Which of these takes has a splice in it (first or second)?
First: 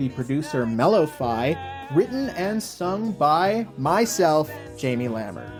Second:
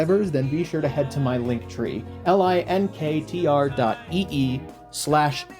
second